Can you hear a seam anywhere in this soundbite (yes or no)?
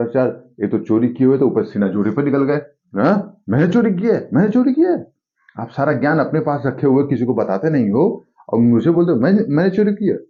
no